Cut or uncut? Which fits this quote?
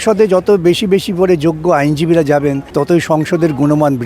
cut